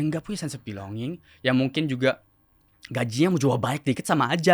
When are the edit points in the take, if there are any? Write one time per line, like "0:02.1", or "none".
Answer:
none

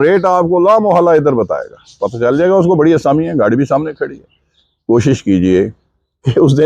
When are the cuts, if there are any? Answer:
none

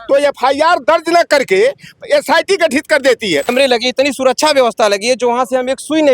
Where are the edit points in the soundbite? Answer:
0:03.5

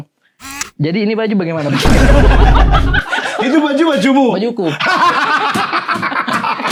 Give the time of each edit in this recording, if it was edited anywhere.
none

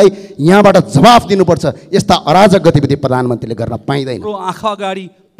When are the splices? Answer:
0:04.2

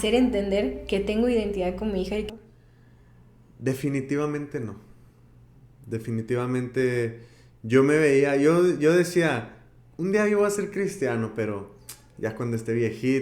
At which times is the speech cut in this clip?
0:02.3

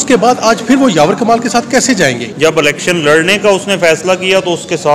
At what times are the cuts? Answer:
0:02.3

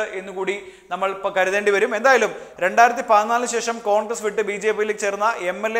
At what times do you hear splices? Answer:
0:02.3

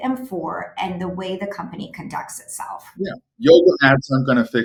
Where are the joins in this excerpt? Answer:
none

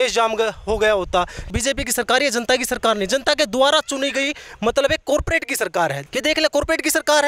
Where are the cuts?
0:01.5
0:06.0

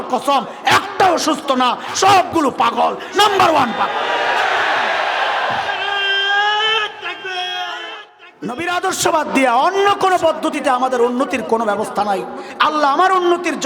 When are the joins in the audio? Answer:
0:07.7

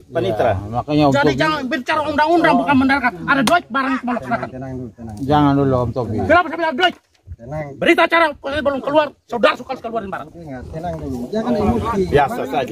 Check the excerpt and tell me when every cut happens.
none

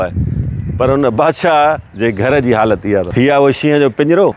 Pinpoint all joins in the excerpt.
0:01.9
0:03.1

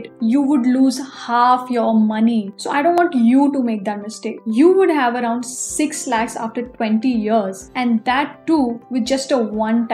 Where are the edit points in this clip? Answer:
0:02.5
0:04.3

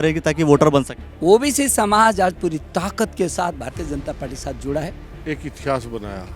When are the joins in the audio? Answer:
0:01.0
0:05.1

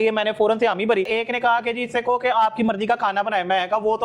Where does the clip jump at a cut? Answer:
0:01.1

